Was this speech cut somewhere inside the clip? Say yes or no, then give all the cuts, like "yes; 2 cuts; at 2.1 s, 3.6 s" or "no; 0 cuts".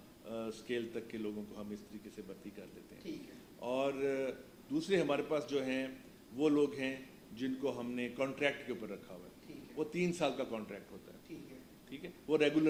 no; 0 cuts